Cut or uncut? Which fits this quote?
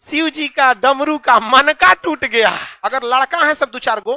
cut